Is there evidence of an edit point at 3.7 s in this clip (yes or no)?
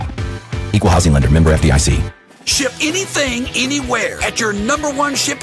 no